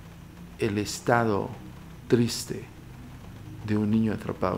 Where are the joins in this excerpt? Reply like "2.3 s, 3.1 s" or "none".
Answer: none